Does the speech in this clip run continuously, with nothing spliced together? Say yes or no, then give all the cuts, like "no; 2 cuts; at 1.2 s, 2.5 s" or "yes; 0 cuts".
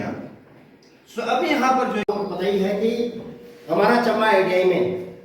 no; 1 cut; at 2.1 s